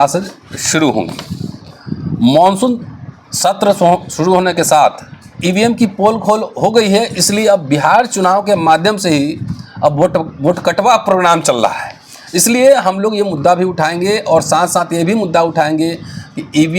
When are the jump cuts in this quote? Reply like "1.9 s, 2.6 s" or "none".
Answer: 5.4 s